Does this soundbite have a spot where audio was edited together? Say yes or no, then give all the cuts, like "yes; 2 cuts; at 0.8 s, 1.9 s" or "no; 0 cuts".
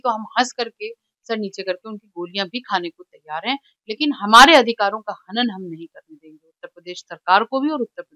no; 0 cuts